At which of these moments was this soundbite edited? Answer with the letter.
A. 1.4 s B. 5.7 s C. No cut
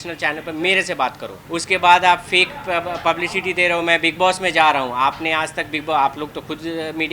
A